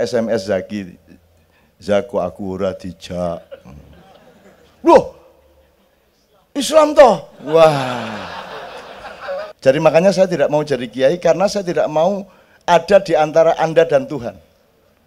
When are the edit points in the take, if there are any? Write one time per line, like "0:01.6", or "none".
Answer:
0:09.5